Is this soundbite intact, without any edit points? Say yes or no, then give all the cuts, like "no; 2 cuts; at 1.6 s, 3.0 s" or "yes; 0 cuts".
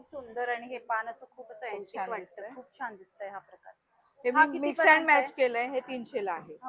yes; 0 cuts